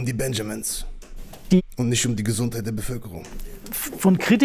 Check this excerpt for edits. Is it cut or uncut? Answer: uncut